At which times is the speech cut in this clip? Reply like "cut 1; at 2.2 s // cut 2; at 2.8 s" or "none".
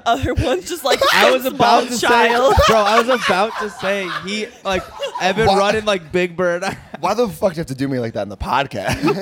none